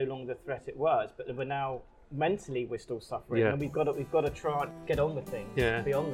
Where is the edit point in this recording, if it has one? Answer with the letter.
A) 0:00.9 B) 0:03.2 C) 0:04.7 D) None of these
C